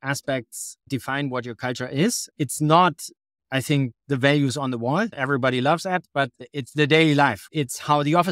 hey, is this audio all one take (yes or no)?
no